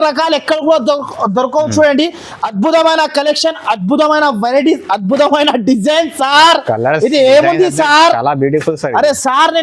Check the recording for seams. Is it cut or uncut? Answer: uncut